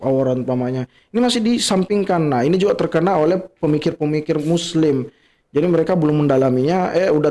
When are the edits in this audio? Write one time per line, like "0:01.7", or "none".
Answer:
none